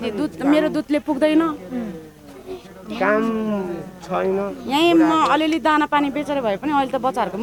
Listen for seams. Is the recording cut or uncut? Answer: uncut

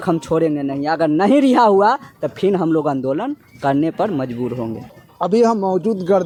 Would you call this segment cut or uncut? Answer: uncut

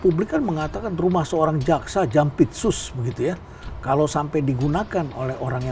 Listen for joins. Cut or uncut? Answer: uncut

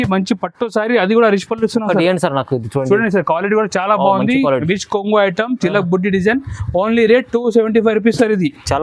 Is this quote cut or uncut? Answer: uncut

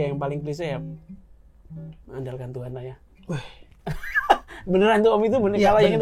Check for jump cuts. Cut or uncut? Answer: uncut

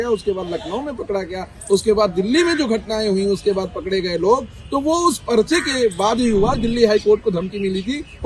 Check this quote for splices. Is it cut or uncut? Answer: cut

